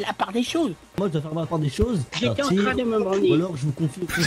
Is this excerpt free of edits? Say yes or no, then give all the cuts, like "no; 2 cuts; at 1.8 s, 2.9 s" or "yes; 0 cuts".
no; 1 cut; at 2.1 s